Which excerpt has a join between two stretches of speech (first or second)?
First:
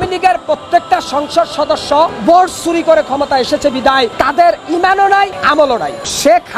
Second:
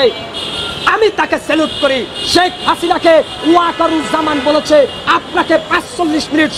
first